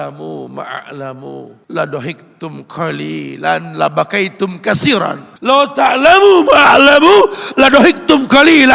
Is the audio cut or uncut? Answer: cut